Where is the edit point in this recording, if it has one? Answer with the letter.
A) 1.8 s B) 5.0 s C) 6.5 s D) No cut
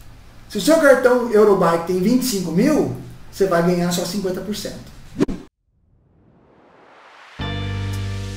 B